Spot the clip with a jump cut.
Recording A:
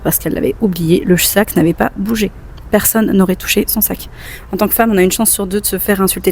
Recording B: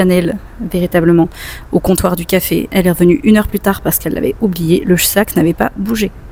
A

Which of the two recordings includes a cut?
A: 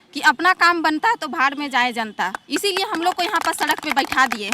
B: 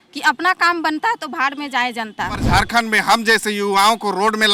B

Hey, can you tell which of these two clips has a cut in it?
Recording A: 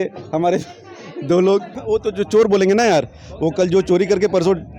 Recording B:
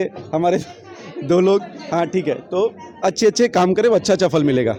A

